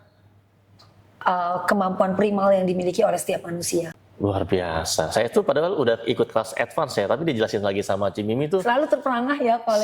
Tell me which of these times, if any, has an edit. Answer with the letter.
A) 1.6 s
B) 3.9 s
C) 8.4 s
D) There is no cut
B